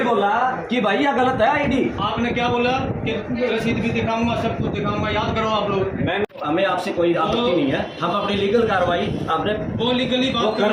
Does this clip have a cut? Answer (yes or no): no